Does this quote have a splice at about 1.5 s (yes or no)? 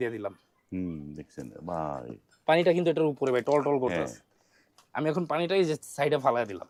no